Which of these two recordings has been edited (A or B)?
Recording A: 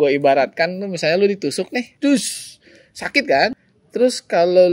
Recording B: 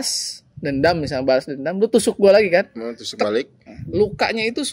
A